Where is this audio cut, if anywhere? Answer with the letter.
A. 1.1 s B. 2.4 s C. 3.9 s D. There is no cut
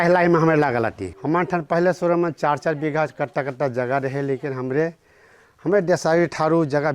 A